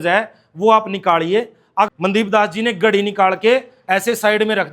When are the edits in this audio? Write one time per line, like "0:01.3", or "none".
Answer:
0:01.9